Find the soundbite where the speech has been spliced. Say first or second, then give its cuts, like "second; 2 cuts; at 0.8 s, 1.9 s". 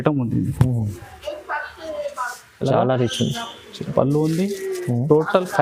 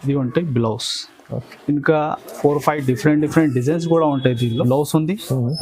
second; 1 cut; at 4.6 s